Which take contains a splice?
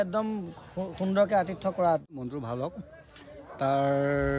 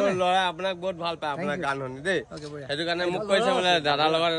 first; 1 cut; at 2.2 s

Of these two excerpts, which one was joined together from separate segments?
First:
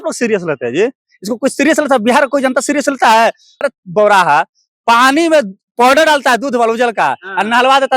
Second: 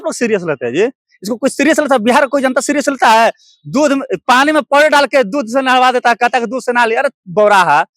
first; 1 cut; at 3.6 s

